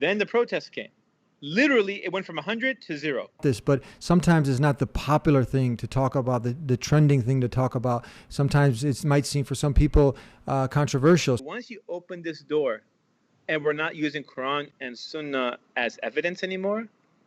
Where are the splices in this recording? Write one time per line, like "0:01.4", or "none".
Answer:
0:03.4
0:11.4